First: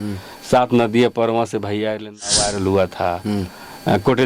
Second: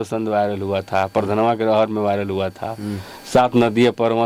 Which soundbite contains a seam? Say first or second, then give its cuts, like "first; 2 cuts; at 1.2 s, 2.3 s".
first; 1 cut; at 2.4 s